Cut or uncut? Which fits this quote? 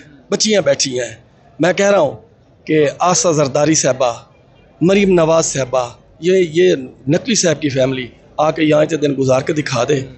uncut